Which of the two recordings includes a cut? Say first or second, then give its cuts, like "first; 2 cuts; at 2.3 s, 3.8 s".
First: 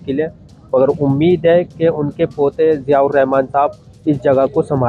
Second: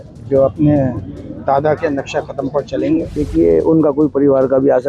second; 1 cut; at 3.1 s